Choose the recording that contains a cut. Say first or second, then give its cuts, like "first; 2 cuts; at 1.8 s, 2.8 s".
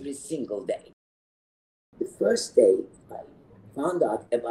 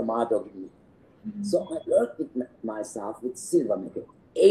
first; 1 cut; at 1.6 s